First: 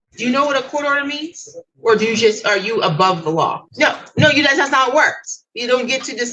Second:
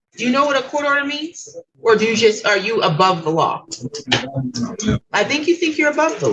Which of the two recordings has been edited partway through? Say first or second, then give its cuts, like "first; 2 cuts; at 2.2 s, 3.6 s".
first; 1 cut; at 3.6 s